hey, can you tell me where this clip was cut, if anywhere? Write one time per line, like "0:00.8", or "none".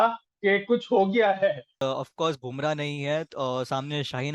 0:01.8

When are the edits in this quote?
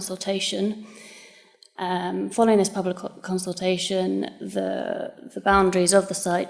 0:03.8

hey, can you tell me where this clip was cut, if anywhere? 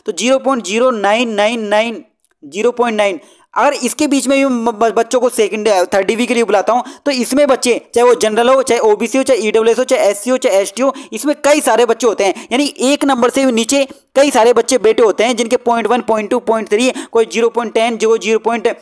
none

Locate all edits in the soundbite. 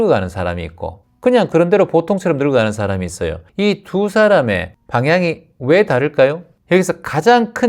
0:03.4
0:04.7
0:06.5

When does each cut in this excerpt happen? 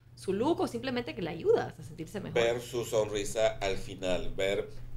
none

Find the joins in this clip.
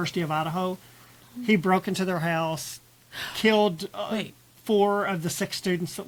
none

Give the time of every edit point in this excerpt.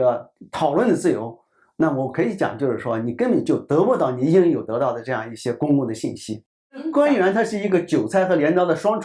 0:06.9

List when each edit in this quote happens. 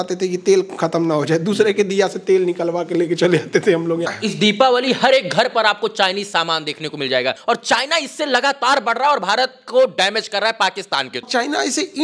0:04.1
0:07.4
0:11.3

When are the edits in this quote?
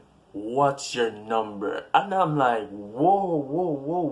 none

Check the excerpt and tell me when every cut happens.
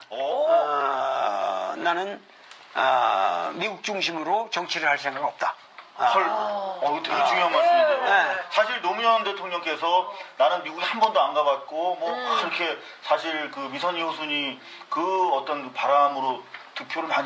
none

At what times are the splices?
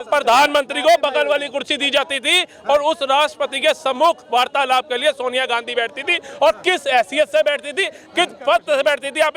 none

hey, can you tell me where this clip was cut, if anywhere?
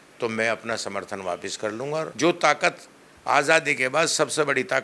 0:02.1

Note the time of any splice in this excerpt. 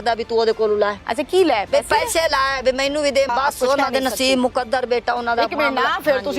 0:01.0
0:03.3

